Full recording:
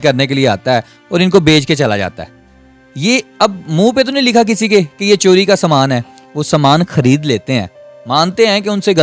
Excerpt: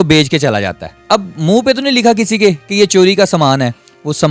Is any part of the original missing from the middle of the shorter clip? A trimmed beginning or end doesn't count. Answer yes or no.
yes